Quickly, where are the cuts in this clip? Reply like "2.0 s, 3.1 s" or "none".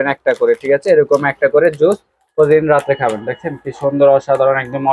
none